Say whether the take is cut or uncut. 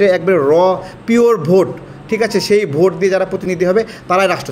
uncut